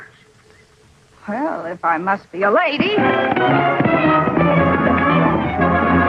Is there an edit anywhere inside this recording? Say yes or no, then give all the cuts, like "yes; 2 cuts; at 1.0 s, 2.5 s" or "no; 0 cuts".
no; 0 cuts